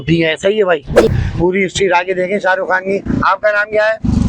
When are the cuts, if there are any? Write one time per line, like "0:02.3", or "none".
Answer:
0:01.1